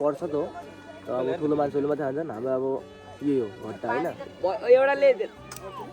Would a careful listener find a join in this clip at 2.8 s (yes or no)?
no